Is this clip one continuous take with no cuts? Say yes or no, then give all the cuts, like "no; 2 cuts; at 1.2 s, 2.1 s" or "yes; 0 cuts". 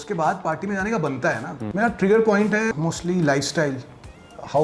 no; 2 cuts; at 1.6 s, 2.7 s